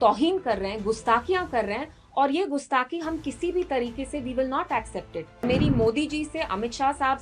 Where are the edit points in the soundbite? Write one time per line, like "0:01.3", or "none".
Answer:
0:05.4